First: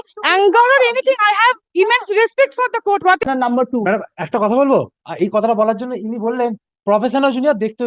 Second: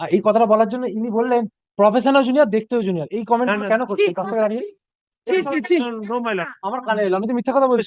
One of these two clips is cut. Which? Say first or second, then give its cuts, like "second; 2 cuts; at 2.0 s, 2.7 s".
first; 1 cut; at 3.3 s